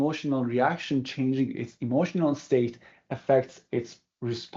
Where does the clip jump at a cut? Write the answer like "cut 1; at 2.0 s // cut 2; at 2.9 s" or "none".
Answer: none